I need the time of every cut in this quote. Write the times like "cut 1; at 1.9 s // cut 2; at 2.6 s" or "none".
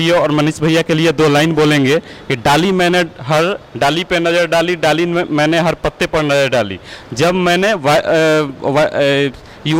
none